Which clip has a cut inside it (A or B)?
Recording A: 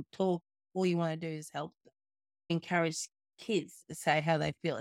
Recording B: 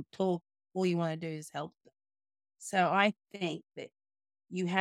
A